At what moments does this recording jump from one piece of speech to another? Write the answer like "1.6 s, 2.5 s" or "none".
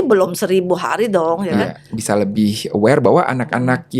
1.8 s